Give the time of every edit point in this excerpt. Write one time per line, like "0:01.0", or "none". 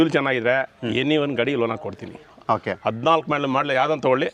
none